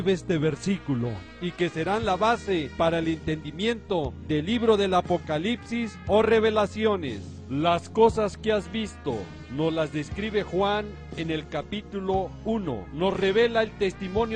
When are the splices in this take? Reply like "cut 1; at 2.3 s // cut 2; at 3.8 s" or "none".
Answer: cut 1; at 12.6 s